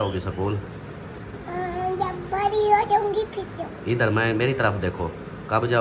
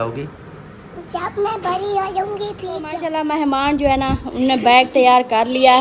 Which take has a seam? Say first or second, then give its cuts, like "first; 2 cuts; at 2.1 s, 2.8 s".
second; 1 cut; at 3.0 s